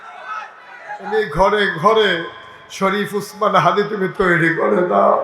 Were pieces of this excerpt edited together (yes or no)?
yes